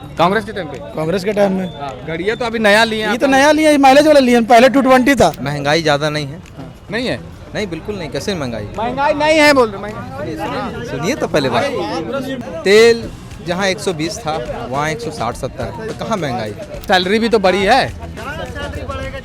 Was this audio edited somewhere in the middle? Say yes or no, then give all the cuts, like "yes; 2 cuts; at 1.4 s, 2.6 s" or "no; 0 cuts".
yes; 3 cuts; at 5.4 s, 12.4 s, 16.8 s